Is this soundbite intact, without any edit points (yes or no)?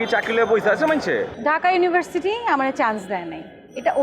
no